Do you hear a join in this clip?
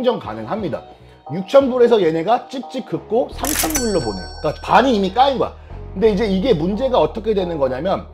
yes; 2 cuts; at 1.2 s, 5.7 s

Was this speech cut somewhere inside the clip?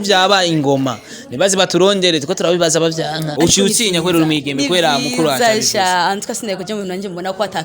yes; 1 cut; at 3.3 s

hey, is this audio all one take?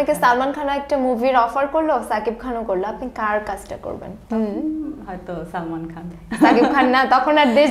yes; 0 cuts

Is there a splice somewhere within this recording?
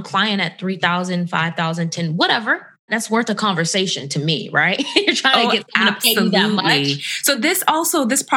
yes; 1 cut; at 2.9 s

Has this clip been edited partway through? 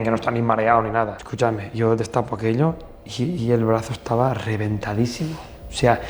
yes; 1 cut; at 1.2 s

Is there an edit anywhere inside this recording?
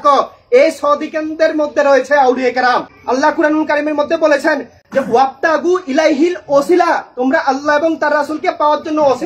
yes; 1 cut; at 2.9 s

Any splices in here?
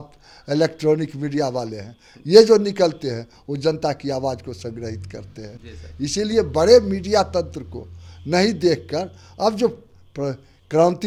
no; 0 cuts

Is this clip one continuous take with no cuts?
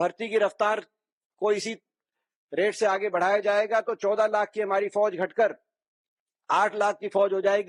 yes; 0 cuts

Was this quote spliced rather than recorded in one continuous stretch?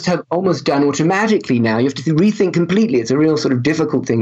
no; 0 cuts

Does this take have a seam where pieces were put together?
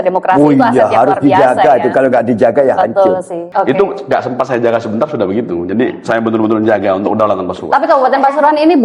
yes; 1 cut; at 3.4 s

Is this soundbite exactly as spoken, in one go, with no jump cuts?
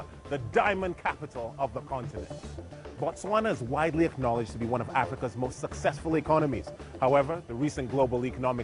no; 1 cut; at 1.3 s

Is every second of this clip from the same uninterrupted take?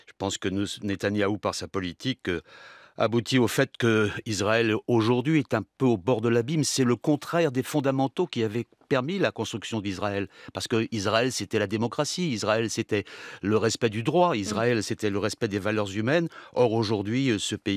yes; 0 cuts

